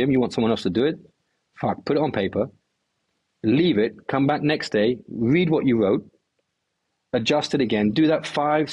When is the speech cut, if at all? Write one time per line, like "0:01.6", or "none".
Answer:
none